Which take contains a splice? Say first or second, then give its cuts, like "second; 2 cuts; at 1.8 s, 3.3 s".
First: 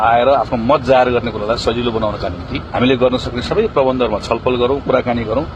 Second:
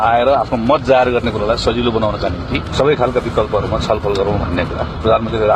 second; 1 cut; at 2.7 s